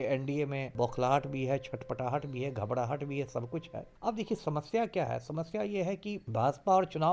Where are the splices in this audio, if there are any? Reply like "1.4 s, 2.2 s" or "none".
0.7 s, 3.8 s, 6.2 s